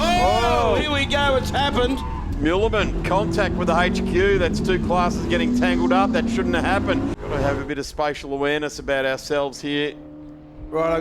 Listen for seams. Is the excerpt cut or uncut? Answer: cut